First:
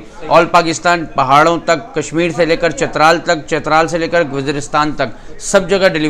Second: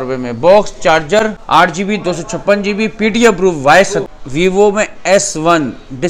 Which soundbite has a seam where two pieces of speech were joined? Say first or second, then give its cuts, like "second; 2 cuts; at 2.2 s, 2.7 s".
second; 2 cuts; at 1.4 s, 4.0 s